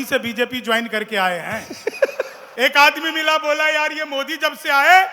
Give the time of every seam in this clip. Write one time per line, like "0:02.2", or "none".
0:02.4